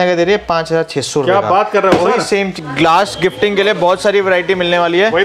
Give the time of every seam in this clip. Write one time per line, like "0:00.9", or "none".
0:02.5

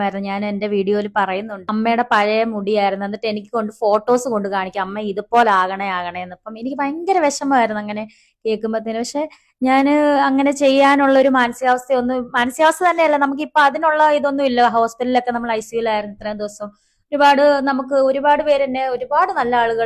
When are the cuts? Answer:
0:01.7

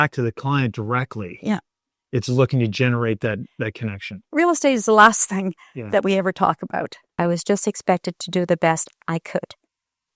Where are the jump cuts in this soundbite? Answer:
0:04.1
0:07.2

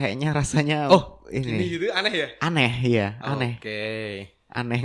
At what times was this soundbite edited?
none

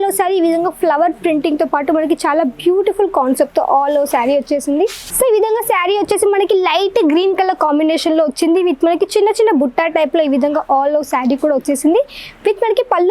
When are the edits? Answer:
0:05.0

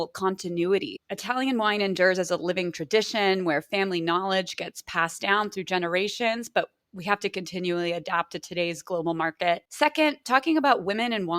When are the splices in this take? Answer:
0:01.0

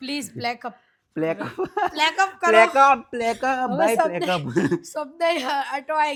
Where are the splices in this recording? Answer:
none

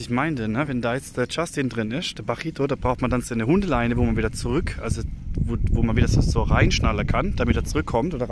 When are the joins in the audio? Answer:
none

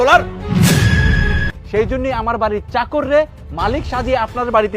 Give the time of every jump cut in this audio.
0:01.5

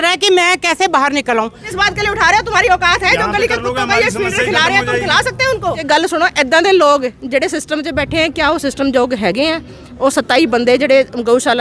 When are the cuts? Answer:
0:01.6
0:05.8

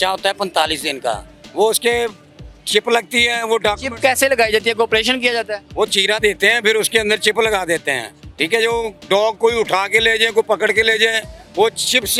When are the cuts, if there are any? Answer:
none

